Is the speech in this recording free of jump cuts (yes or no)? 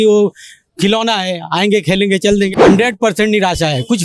no